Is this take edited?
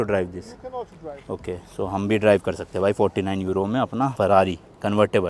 no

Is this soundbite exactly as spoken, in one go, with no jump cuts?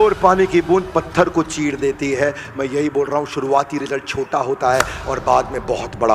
yes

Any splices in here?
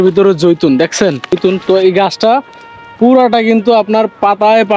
yes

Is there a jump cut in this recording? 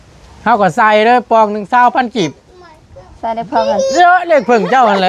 no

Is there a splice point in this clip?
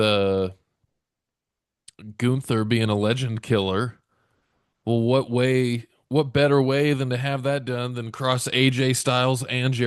no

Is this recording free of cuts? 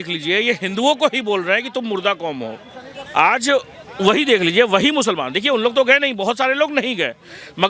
no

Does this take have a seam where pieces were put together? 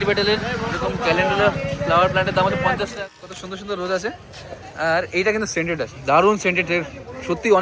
yes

